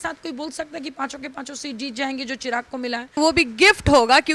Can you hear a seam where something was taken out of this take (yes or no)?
yes